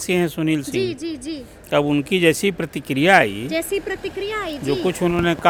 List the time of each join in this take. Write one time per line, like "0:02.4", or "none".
none